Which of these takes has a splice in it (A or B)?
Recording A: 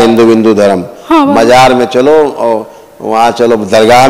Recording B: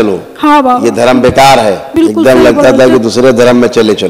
B